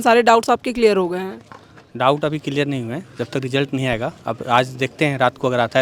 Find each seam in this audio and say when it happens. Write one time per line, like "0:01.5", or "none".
none